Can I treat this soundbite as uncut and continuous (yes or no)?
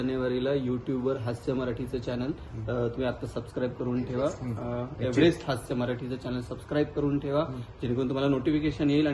yes